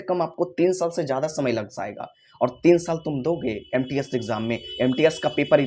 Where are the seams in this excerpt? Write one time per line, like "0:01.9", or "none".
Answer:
none